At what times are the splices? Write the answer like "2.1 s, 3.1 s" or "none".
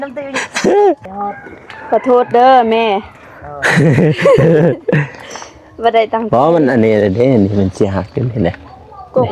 1.1 s